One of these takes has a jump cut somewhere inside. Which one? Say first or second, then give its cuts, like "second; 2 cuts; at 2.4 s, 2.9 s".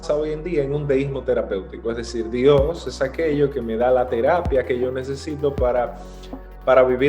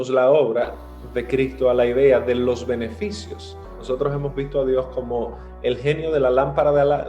second; 1 cut; at 3.8 s